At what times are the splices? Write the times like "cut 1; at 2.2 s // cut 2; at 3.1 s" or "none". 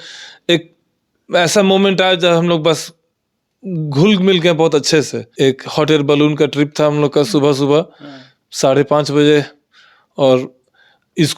cut 1; at 5.2 s